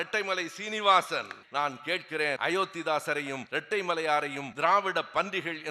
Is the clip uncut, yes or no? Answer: no